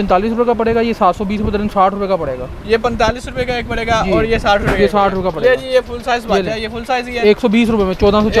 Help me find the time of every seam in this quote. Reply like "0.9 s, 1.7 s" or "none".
none